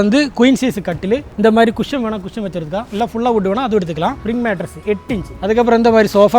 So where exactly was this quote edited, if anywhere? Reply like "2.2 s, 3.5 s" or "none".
4.2 s, 5.3 s